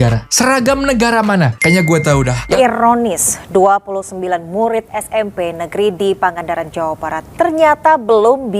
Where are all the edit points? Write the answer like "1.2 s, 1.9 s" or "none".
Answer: 2.6 s

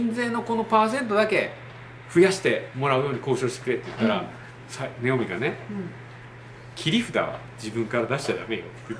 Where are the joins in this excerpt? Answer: none

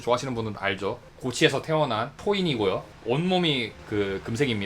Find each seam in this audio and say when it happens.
2.1 s, 2.9 s

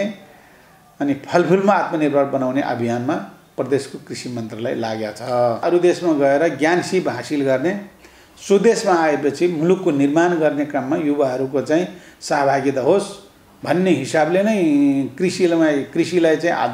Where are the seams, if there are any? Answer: 5.6 s

